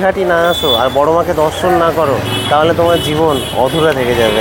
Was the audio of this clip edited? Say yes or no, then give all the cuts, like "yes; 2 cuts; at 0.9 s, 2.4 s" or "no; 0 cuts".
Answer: no; 0 cuts